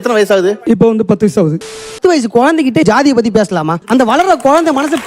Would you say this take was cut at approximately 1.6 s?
yes; 2 cuts; at 1.6 s, 3.3 s

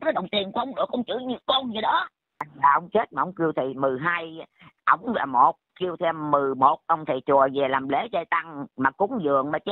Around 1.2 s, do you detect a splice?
no; 1 cut; at 2.5 s

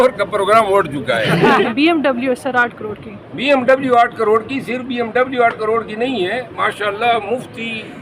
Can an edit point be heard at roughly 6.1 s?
no; 1 cut; at 1.7 s

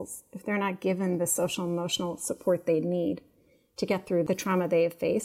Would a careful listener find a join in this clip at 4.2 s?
yes; 1 cut; at 4.2 s

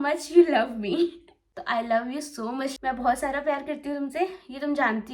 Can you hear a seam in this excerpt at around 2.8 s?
yes; 1 cut; at 2.8 s

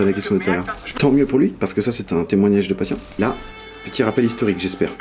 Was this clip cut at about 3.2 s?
yes; 2 cuts; at 0.9 s, 3.2 s

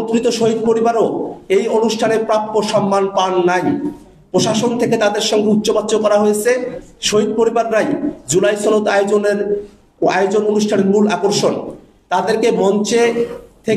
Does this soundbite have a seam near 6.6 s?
no; 0 cuts

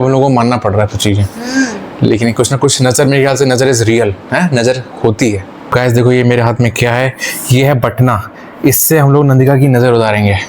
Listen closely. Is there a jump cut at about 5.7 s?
yes; 1 cut; at 5.7 s

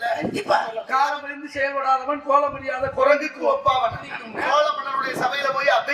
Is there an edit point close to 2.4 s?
no; 2 cuts; at 0.9 s, 4.2 s

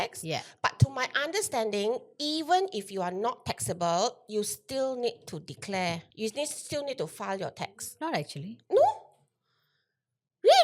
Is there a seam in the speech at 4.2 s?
no; 1 cut; at 6.1 s

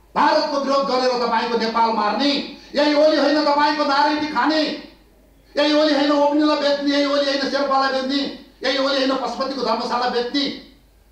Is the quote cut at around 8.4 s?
no; 0 cuts

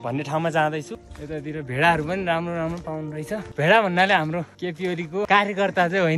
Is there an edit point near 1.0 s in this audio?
yes; 3 cuts; at 1.0 s, 3.5 s, 5.1 s

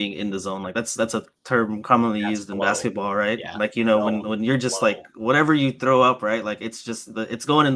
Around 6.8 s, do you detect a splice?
no; 0 cuts

